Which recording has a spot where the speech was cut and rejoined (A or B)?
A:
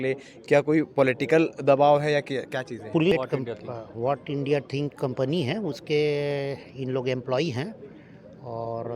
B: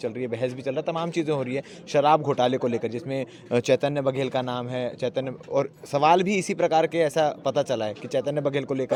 A